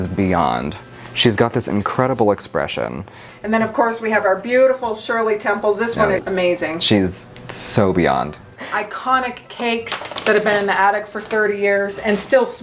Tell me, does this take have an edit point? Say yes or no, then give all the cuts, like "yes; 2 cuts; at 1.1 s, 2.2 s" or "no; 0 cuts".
yes; 2 cuts; at 3.2 s, 8.6 s